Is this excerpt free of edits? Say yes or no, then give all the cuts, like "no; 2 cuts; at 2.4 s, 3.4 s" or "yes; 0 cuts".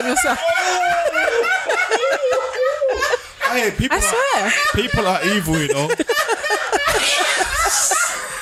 yes; 0 cuts